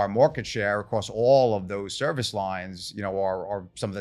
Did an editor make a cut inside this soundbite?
no; 0 cuts

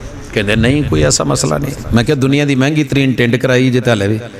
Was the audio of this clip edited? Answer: no; 0 cuts

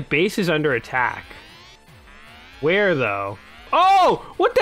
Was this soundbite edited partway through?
yes; 1 cut; at 3.7 s

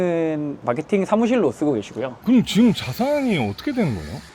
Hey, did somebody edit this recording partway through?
yes; 1 cut; at 2.0 s

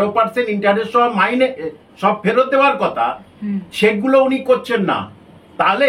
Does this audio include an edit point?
no; 0 cuts

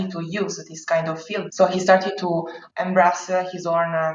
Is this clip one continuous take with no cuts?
no; 1 cut; at 1.5 s

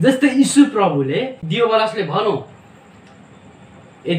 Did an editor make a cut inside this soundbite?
yes; 1 cut; at 1.4 s

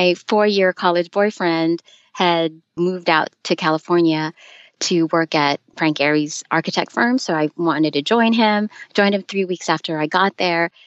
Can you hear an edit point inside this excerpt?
yes; 1 cut; at 2.6 s

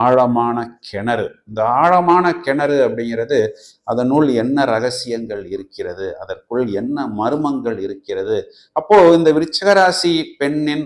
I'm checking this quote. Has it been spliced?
no; 0 cuts

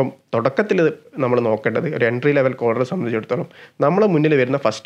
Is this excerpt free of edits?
yes; 0 cuts

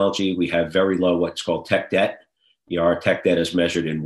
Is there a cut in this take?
no; 0 cuts

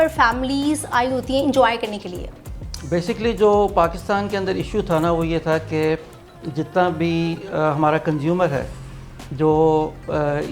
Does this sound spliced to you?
no; 0 cuts

